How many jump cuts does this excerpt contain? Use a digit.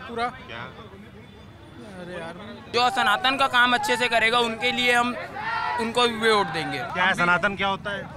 2